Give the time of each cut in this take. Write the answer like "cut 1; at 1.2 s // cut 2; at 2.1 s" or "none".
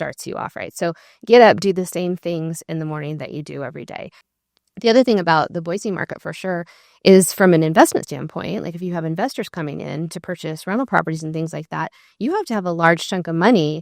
cut 1; at 4.3 s